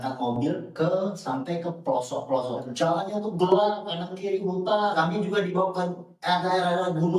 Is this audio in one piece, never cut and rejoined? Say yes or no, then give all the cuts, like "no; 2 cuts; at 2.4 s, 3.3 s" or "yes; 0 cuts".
no; 2 cuts; at 2.7 s, 4.9 s